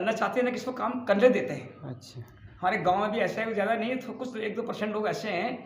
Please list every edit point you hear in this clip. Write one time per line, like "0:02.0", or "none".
none

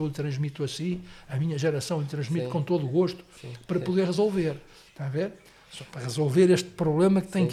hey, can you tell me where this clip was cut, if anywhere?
none

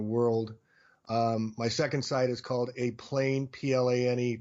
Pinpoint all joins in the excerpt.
0:01.5

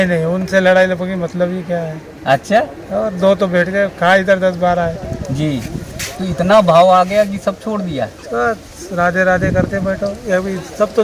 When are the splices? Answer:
none

